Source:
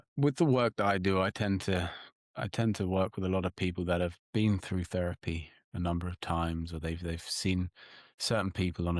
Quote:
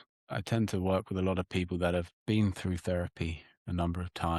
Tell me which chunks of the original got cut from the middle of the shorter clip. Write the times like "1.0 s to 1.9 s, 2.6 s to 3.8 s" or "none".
none